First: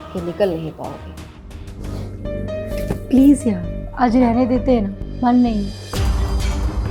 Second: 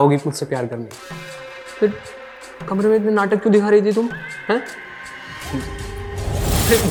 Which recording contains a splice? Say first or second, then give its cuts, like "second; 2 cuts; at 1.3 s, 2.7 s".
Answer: first; 1 cut; at 1.7 s